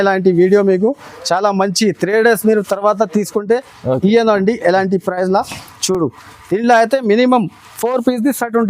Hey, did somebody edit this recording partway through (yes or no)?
no